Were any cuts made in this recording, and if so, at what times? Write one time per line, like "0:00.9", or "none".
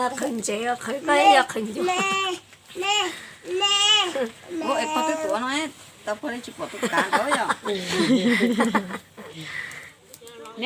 none